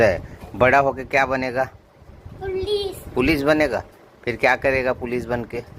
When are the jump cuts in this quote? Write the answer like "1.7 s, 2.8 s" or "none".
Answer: none